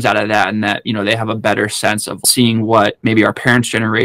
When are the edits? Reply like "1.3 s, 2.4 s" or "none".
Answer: 2.2 s, 3.0 s